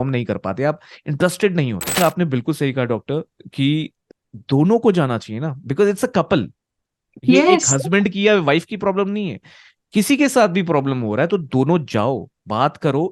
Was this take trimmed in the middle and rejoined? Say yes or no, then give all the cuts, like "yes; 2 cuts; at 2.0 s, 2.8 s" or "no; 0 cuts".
yes; 2 cuts; at 2.0 s, 4.0 s